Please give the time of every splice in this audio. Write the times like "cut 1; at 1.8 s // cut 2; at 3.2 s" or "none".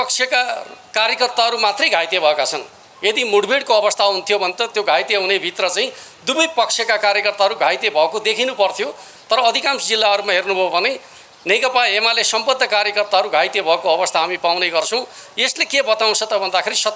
none